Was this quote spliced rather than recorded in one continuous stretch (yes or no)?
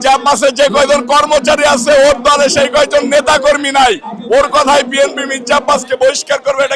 no